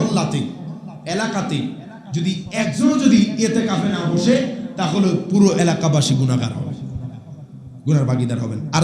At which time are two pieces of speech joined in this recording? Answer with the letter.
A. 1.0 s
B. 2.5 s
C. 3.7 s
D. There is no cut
B